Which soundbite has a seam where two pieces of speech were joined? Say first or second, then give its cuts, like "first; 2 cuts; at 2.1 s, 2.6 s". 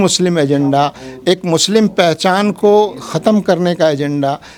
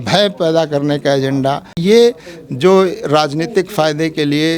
second; 1 cut; at 1.8 s